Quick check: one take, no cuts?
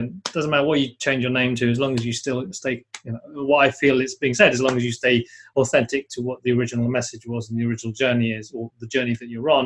yes; 0 cuts

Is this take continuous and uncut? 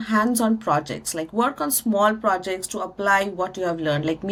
yes; 0 cuts

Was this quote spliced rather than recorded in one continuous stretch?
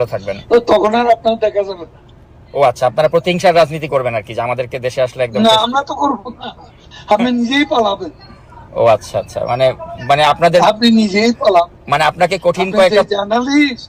no; 0 cuts

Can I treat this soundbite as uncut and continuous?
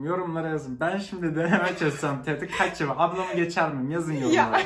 yes; 0 cuts

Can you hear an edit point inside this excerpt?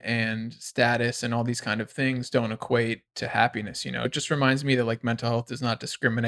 yes; 1 cut; at 4.1 s

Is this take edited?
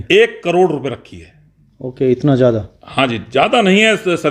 no; 0 cuts

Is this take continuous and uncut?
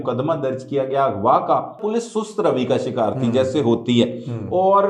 no; 1 cut; at 1.8 s

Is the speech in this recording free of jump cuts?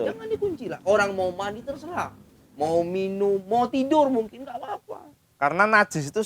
yes; 0 cuts

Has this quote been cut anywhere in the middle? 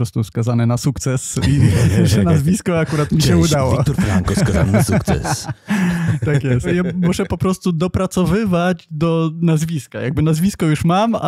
no; 0 cuts

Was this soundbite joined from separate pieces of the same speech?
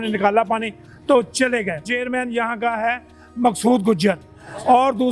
yes; 1 cut; at 1.8 s

